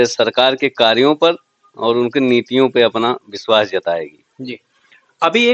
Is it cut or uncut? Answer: uncut